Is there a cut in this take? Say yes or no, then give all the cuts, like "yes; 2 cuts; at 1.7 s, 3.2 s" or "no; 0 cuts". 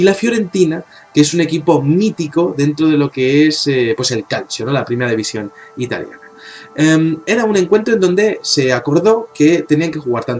no; 0 cuts